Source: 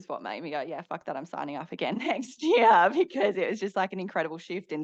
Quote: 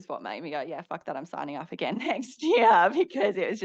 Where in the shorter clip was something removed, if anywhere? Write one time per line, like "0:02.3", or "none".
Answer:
none